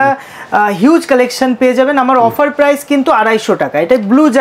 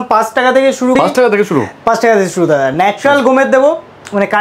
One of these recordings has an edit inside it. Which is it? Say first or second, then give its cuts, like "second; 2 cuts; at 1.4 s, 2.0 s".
second; 1 cut; at 0.9 s